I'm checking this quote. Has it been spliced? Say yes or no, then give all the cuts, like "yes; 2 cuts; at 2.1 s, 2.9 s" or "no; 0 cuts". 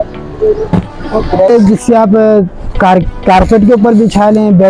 yes; 1 cut; at 1.5 s